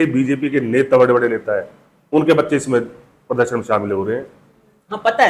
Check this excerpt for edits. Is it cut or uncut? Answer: uncut